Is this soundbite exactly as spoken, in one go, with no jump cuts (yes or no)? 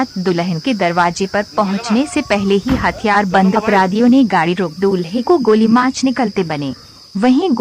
no